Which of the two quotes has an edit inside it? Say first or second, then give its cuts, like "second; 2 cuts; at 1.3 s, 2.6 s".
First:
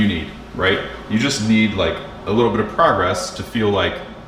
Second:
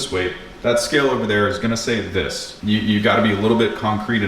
second; 1 cut; at 2.4 s